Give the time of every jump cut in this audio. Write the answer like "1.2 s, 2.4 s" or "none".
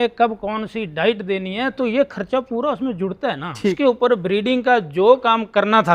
3.8 s